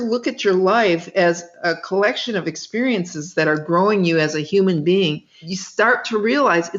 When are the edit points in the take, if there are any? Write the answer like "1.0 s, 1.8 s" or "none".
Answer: 5.3 s